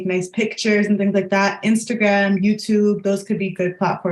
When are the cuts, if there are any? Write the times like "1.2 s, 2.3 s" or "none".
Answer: none